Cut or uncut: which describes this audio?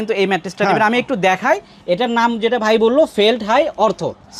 uncut